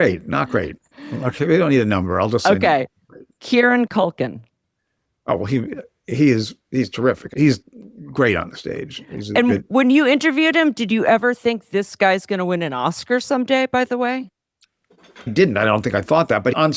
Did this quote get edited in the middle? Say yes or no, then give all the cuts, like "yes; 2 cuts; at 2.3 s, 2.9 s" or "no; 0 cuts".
no; 0 cuts